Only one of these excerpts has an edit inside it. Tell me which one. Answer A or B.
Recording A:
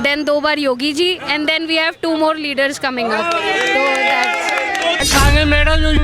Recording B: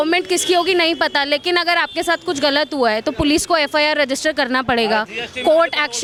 A